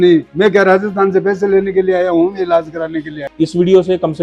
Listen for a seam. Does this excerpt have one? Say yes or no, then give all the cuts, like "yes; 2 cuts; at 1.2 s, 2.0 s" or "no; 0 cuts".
yes; 1 cut; at 3.2 s